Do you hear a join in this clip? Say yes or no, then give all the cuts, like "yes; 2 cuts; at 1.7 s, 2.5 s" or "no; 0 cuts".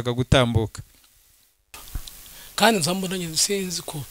yes; 1 cut; at 1.7 s